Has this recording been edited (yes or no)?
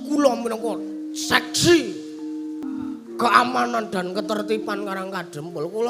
yes